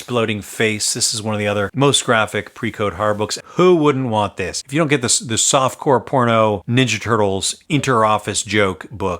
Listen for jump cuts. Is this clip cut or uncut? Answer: cut